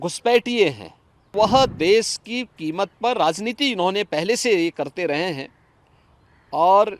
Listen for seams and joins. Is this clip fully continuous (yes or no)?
no